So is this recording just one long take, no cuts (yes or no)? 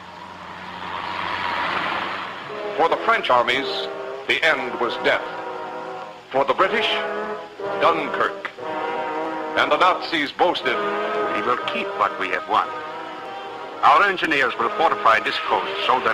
no